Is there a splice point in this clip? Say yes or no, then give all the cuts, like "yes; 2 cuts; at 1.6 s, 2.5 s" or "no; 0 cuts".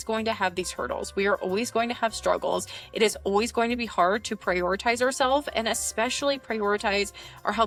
no; 0 cuts